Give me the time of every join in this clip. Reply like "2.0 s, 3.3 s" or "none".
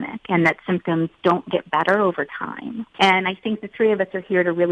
2.8 s